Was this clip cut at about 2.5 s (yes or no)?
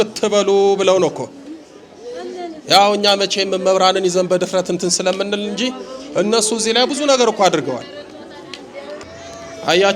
no